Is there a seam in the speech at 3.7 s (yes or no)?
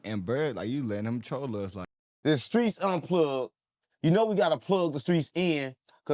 no